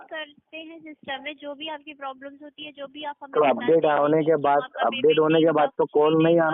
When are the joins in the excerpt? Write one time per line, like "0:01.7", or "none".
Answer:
none